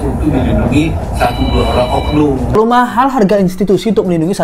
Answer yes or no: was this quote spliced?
yes